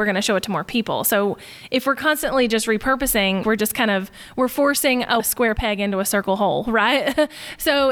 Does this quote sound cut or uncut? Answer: cut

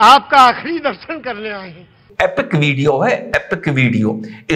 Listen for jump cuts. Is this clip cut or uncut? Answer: cut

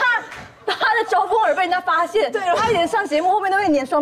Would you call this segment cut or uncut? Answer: uncut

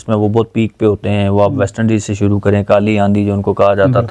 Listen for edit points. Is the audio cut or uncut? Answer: uncut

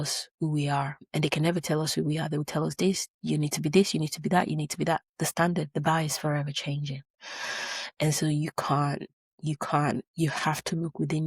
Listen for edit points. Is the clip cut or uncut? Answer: cut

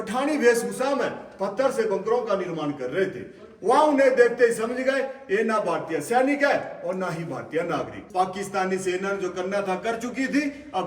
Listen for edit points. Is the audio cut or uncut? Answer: cut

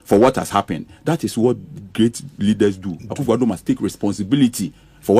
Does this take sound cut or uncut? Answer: uncut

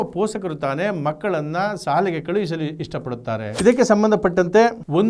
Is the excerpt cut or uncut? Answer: cut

